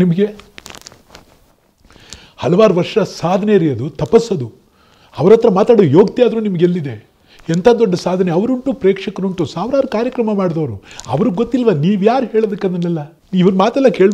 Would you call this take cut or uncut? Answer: cut